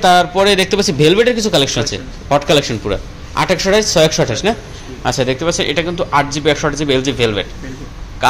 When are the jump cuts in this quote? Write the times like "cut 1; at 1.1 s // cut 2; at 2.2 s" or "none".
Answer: none